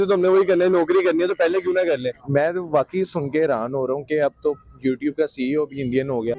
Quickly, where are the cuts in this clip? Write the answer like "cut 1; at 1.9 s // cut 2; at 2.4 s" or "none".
cut 1; at 2.2 s